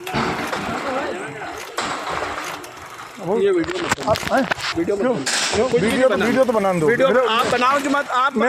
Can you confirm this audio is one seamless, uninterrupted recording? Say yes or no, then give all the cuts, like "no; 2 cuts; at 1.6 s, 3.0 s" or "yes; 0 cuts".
yes; 0 cuts